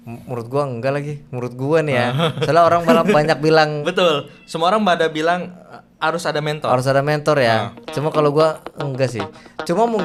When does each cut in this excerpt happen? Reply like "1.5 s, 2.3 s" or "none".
none